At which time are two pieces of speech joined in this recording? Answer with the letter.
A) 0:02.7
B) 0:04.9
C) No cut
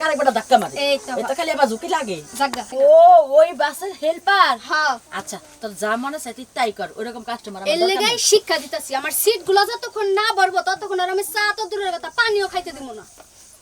A